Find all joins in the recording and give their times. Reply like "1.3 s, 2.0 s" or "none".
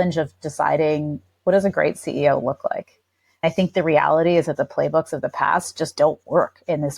3.4 s